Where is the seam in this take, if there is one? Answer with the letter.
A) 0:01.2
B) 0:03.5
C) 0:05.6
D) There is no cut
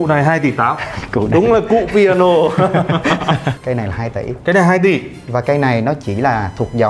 B